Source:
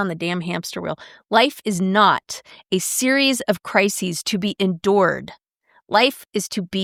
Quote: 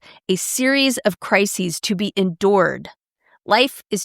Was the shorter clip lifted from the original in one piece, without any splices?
yes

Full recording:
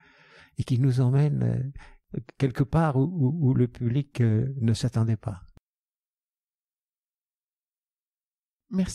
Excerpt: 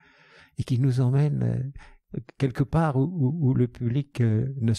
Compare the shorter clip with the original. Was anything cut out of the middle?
no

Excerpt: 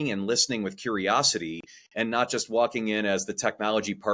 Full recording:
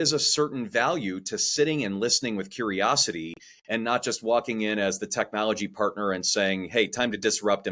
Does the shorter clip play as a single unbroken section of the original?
yes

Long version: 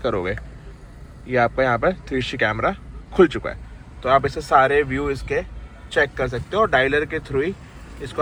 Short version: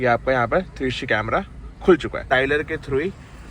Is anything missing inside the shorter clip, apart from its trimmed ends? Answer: yes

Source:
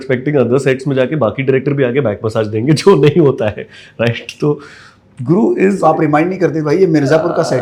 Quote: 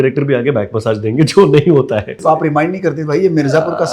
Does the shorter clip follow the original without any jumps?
no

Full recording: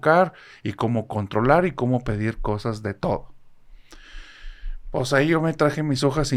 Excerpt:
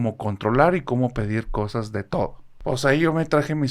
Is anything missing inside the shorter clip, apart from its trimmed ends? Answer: yes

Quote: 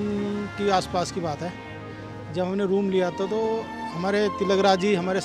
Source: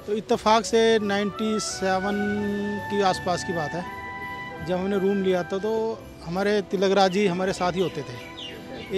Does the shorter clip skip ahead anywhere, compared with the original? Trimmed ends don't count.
no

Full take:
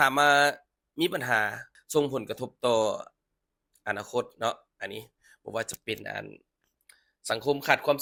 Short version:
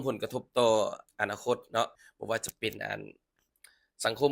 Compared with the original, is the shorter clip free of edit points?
no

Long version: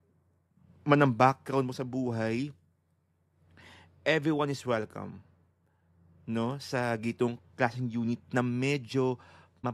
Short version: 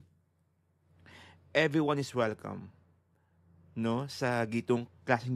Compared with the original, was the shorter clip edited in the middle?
no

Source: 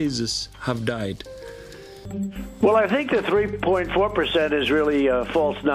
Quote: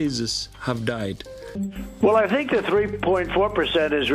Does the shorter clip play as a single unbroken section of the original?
no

